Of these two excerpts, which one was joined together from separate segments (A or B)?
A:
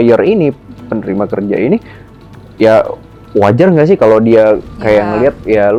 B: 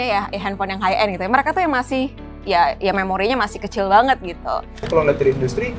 B